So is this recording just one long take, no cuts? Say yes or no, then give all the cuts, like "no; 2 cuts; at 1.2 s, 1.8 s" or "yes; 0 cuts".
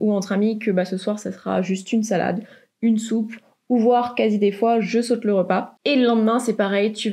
yes; 0 cuts